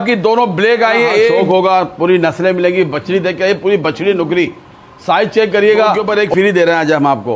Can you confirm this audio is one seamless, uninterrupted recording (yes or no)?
no